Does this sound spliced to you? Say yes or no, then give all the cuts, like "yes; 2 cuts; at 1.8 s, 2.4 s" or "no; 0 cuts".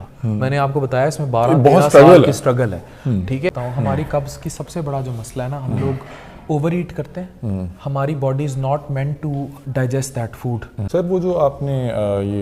yes; 2 cuts; at 3.5 s, 10.7 s